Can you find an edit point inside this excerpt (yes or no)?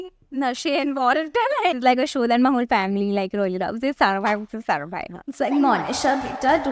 yes